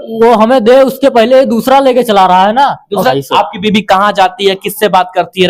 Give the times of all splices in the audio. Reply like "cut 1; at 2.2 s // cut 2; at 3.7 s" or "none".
cut 1; at 3.1 s